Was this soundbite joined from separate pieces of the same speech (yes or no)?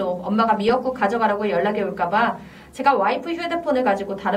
no